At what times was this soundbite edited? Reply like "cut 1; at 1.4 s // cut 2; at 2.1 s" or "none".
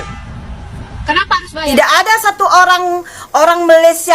cut 1; at 1.7 s